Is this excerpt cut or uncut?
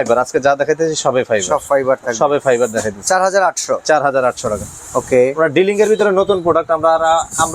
uncut